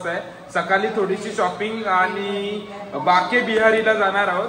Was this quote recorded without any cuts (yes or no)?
yes